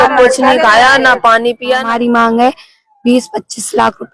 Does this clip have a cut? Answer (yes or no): yes